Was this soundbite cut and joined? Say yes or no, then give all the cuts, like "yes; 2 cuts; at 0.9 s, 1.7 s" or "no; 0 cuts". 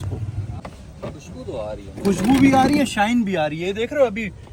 no; 0 cuts